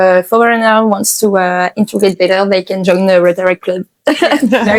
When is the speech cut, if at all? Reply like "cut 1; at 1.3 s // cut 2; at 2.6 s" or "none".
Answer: none